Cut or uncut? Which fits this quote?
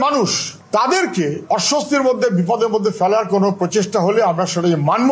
uncut